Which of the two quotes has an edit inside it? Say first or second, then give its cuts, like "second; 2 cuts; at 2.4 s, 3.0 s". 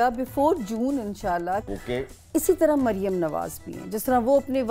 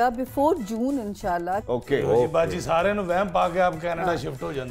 first; 1 cut; at 1.6 s